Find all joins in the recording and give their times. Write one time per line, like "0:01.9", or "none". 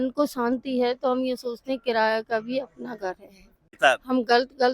0:03.7